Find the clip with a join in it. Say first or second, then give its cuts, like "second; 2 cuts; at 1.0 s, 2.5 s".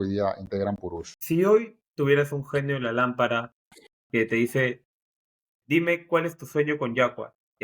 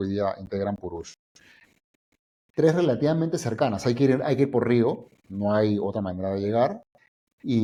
first; 2 cuts; at 1.1 s, 1.9 s